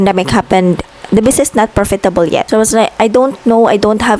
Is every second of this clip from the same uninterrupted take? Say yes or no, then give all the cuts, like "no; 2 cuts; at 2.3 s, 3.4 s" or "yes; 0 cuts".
no; 1 cut; at 2.5 s